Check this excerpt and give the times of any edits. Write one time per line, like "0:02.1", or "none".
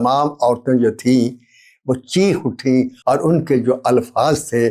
0:02.9